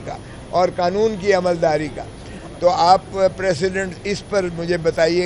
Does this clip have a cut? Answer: no; 0 cuts

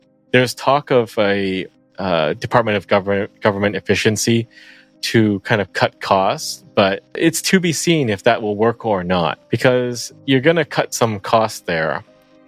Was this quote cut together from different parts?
yes; 3 cuts; at 7.1 s, 9.4 s, 10.1 s

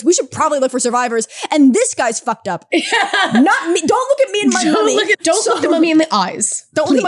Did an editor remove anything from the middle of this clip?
yes; 1 cut; at 5.1 s

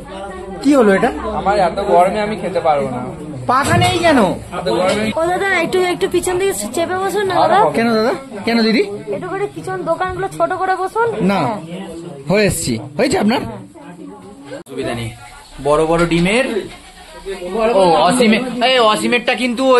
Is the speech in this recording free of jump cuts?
no; 2 cuts; at 5.1 s, 14.7 s

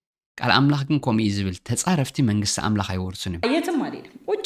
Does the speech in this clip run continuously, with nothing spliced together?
no; 1 cut; at 3.4 s

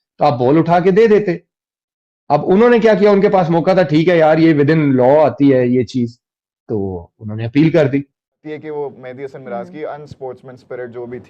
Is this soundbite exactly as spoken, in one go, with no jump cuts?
no; 1 cut; at 8.4 s

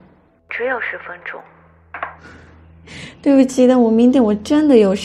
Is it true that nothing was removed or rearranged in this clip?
yes; 0 cuts

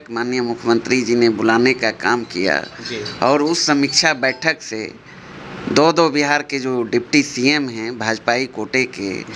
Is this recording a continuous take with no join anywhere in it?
yes; 0 cuts

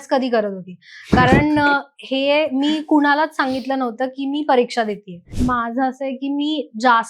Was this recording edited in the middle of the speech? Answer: yes; 1 cut; at 5.3 s

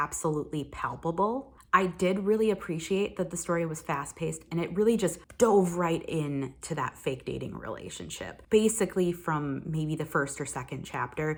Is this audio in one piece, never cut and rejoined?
yes; 0 cuts

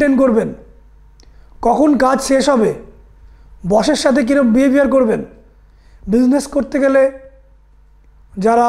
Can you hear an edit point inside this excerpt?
no; 0 cuts

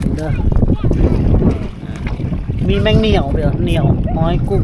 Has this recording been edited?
no; 0 cuts

